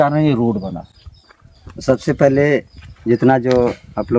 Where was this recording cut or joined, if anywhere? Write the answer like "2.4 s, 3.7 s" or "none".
none